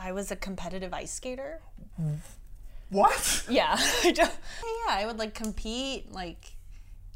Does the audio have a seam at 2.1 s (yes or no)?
no